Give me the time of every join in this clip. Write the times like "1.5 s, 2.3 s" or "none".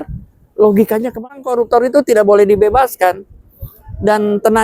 1.1 s